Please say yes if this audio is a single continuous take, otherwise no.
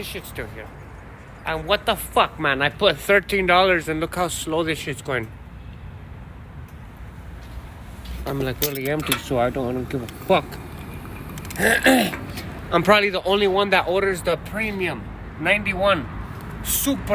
yes